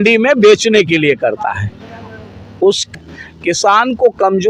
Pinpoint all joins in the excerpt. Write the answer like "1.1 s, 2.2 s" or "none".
2.8 s